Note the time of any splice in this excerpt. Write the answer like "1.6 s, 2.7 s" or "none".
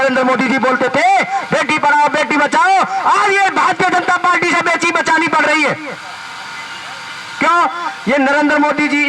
none